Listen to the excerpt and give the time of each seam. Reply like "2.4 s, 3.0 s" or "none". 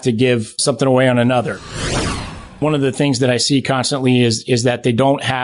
1.9 s